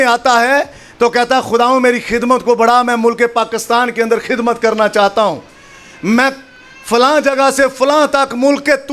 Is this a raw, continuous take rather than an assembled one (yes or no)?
yes